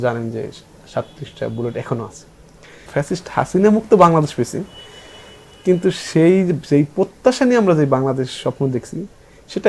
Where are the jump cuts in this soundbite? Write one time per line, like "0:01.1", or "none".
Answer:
0:02.9